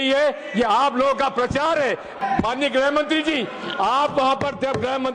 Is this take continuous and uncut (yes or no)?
no